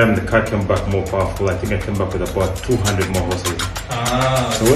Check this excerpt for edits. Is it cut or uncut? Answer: uncut